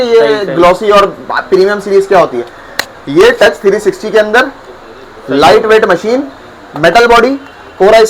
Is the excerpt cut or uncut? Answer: uncut